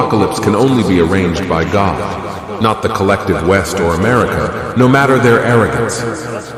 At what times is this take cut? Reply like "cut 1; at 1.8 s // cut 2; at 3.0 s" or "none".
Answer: none